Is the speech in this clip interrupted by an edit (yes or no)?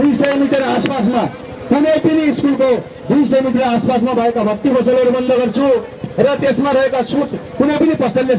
no